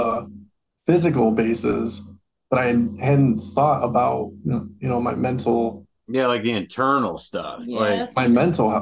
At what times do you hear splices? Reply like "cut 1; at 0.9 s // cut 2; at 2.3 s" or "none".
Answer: none